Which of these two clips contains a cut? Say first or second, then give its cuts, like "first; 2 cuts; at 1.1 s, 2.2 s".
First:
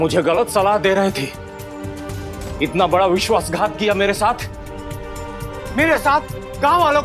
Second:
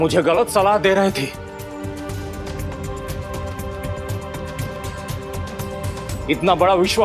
first; 2 cuts; at 2.4 s, 5.6 s